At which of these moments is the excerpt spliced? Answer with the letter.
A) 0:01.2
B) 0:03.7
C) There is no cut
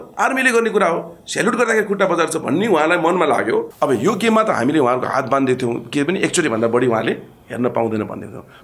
B